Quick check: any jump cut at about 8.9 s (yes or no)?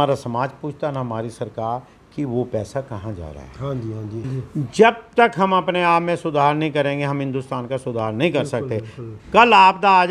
no